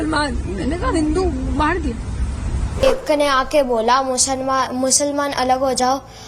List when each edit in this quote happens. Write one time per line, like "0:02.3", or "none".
0:02.8